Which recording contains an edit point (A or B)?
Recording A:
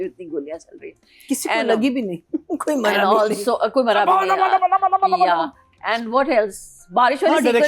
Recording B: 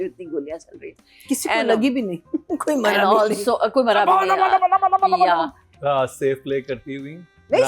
B